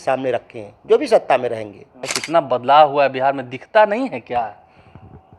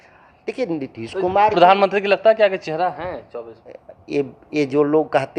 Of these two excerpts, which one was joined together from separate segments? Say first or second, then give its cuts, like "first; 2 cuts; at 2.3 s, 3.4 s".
first; 1 cut; at 2.1 s